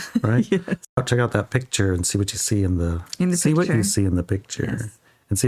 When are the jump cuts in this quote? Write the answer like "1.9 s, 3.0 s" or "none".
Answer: 1.0 s

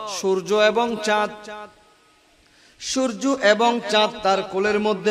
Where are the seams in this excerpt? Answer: none

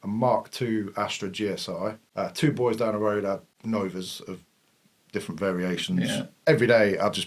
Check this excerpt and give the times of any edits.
2.0 s, 3.5 s, 6.3 s

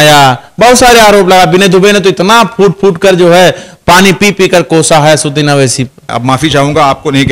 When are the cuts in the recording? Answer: 6.1 s

